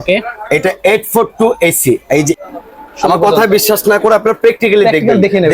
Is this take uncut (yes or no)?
no